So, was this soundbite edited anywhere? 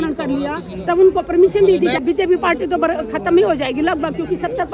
yes; 1 cut; at 2.0 s

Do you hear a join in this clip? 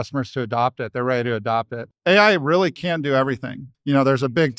yes; 2 cuts; at 1.8 s, 3.7 s

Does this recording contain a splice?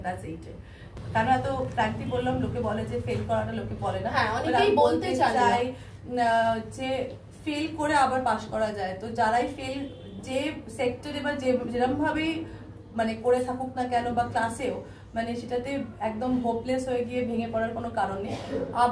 yes; 1 cut; at 1.0 s

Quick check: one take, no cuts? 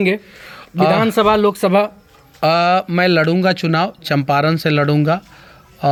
yes; 0 cuts

